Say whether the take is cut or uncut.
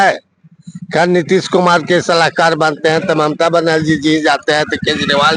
uncut